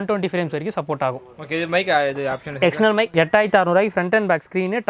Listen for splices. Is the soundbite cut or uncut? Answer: cut